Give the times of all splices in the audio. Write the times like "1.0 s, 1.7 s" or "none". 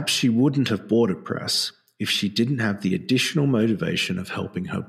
none

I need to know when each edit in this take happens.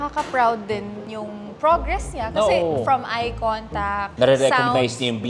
4.1 s

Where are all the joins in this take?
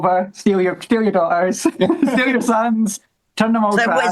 none

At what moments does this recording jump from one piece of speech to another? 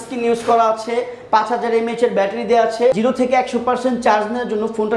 3.0 s

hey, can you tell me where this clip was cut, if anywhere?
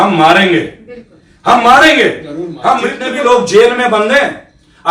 3.0 s

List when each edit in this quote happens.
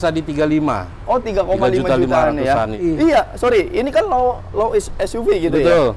2.8 s

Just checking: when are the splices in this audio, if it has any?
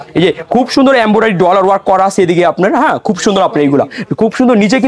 none

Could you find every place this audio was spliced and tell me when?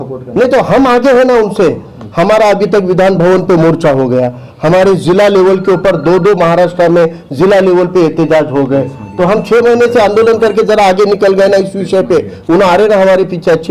none

